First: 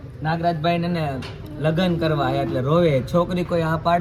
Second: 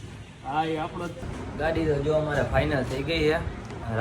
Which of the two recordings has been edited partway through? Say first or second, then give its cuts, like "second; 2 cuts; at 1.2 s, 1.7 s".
second; 1 cut; at 1.2 s